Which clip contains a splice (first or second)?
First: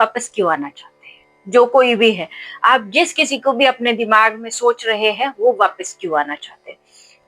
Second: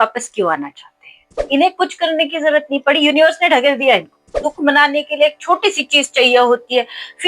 second